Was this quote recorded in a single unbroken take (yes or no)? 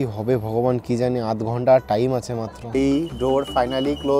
no